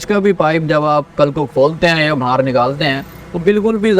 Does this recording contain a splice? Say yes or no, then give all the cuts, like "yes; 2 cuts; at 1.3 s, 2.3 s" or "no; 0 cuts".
no; 0 cuts